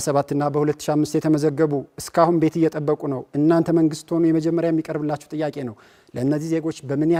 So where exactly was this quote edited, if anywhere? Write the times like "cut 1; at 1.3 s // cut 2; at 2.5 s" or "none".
none